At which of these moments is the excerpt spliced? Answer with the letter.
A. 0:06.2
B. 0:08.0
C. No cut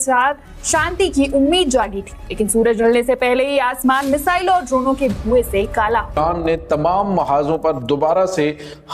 A